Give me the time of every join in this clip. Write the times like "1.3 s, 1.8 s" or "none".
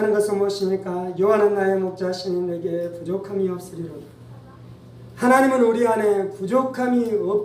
4.9 s